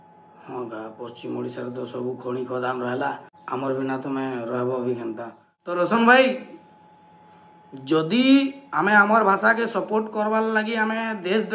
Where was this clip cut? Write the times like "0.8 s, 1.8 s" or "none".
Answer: 5.8 s